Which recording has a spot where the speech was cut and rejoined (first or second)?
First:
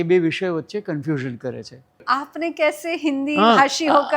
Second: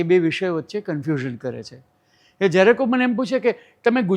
first